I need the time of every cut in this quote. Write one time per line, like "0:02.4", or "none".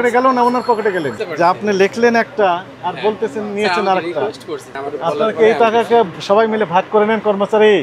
0:01.1
0:04.7